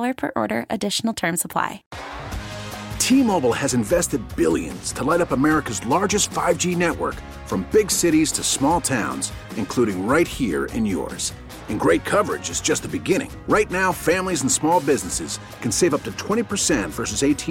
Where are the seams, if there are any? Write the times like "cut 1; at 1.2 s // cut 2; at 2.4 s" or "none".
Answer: cut 1; at 1.9 s